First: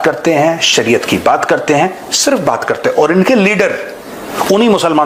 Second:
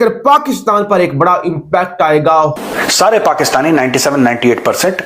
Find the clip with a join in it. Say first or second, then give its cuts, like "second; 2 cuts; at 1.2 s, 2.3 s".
second; 1 cut; at 2.6 s